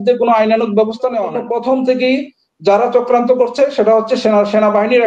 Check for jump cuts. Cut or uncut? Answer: cut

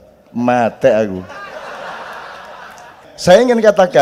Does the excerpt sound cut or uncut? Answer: cut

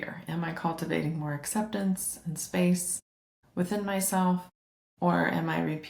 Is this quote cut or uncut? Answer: uncut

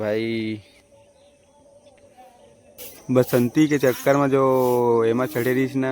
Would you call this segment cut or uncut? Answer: cut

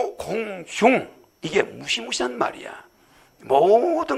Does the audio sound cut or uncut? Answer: uncut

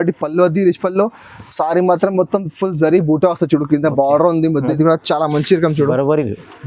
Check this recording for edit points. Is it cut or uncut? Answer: cut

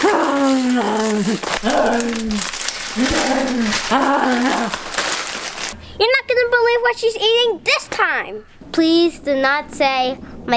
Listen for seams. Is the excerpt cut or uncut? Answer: cut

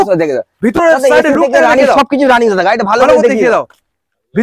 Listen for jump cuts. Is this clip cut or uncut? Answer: uncut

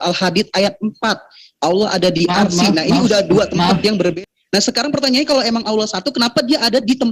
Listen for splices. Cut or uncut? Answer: cut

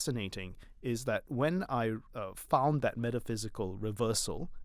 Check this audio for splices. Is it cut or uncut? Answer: cut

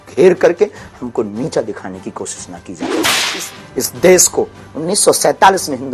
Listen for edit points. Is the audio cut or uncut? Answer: cut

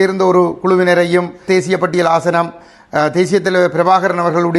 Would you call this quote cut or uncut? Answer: cut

